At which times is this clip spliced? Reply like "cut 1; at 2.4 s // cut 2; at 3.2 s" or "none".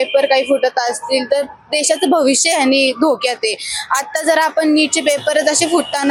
none

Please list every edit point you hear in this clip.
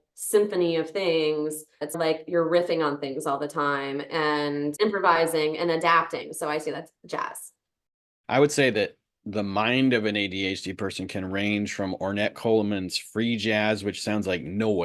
cut 1; at 1.9 s // cut 2; at 4.7 s

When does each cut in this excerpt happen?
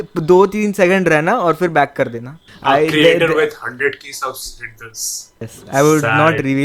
cut 1; at 2.5 s // cut 2; at 5.5 s

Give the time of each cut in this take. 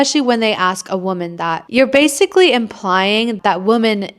cut 1; at 1.6 s // cut 2; at 3.4 s

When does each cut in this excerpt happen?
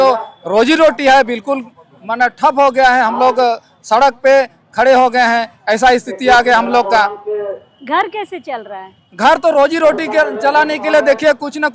none

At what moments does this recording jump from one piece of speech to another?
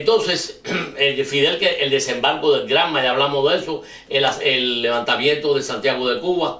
none

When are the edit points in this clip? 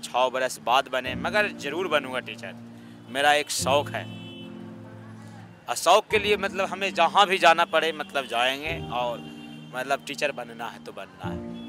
none

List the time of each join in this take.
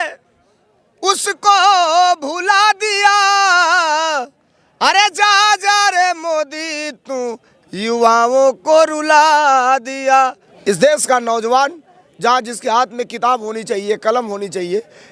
cut 1; at 10.5 s

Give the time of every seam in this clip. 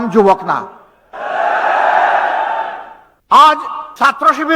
cut 1; at 3.1 s

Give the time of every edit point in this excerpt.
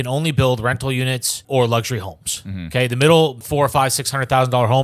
cut 1; at 1.4 s // cut 2; at 3.4 s

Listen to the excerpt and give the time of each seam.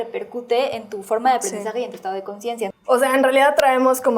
cut 1; at 2.7 s

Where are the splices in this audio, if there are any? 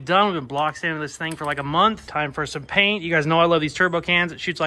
cut 1; at 2.0 s

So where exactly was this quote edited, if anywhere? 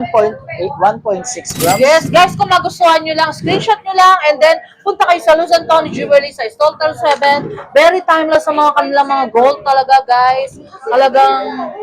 none

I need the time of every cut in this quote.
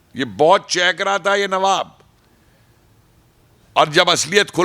none

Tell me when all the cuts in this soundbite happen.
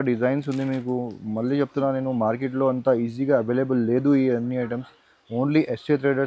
none

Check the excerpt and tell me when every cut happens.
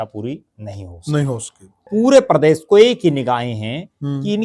cut 1; at 1.9 s

